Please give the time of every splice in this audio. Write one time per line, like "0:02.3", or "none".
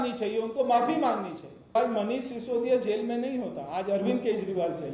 0:01.8